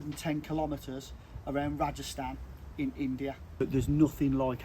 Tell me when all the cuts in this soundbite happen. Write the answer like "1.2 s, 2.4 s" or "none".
3.6 s